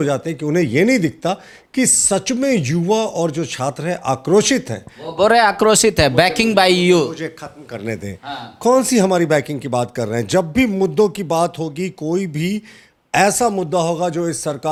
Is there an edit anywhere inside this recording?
no; 0 cuts

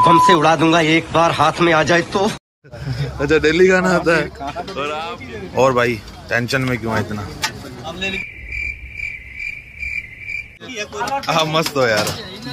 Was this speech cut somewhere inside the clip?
yes; 1 cut; at 11.0 s

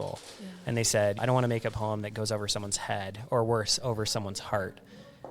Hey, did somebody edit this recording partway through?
yes; 1 cut; at 1.2 s

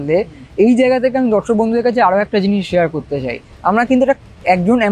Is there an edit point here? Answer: yes; 1 cut; at 3.4 s

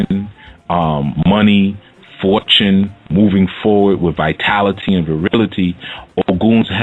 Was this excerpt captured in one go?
no; 1 cut; at 5.8 s

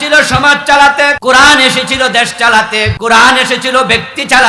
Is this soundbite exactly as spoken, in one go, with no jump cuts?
no; 2 cuts; at 1.2 s, 2.9 s

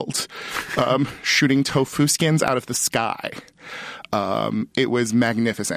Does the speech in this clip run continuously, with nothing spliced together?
yes; 0 cuts

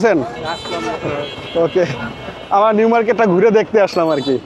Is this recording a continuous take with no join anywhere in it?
yes; 0 cuts

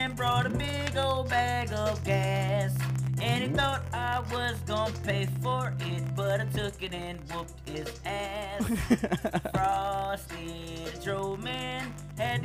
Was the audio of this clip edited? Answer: no; 0 cuts

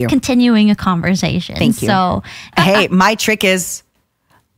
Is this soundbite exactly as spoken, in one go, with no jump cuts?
no; 1 cut; at 2.5 s

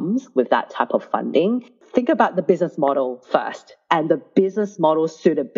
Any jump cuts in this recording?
yes; 1 cut; at 1.8 s

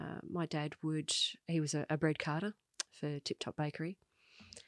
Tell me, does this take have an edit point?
no; 0 cuts

